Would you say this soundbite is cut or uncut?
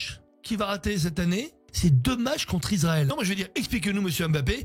cut